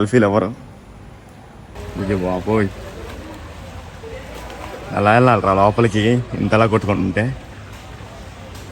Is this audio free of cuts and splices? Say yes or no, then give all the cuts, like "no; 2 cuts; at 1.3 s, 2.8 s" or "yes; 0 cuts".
no; 1 cut; at 1.7 s